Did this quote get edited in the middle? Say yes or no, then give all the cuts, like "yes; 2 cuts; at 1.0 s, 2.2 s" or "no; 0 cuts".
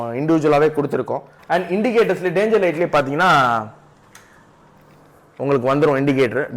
yes; 1 cut; at 1.3 s